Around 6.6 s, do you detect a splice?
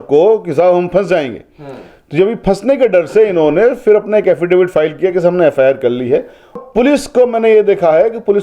yes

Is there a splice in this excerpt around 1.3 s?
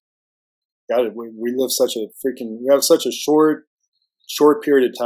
no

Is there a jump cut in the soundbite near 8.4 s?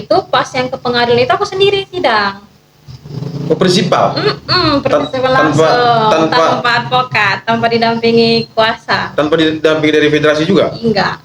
no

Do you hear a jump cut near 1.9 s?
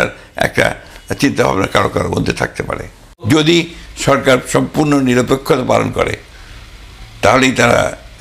no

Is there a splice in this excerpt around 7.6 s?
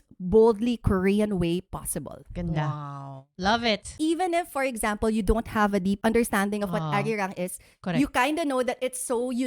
no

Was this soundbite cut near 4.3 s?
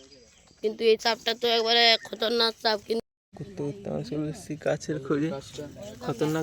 no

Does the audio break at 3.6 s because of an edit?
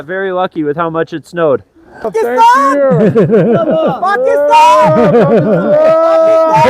no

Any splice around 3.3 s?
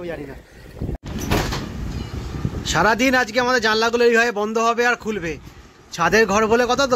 no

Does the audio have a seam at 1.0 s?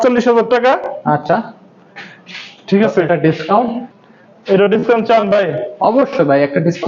no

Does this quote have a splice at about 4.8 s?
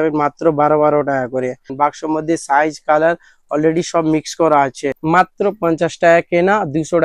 yes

